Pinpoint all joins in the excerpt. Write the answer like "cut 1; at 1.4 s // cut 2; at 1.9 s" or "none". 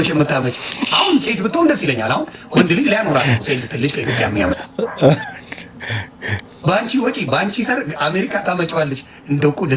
none